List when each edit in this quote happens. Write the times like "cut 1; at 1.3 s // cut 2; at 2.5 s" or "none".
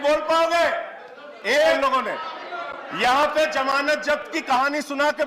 cut 1; at 1.8 s